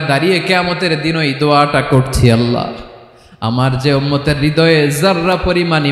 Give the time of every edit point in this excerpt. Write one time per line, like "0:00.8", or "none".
none